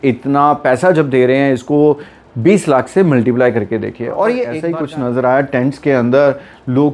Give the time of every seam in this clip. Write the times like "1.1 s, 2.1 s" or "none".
4.6 s